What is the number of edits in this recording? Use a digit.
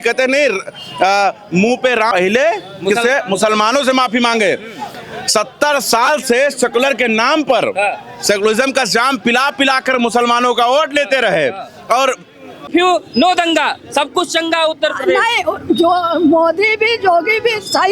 2